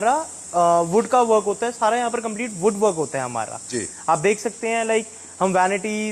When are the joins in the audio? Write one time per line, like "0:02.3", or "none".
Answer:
none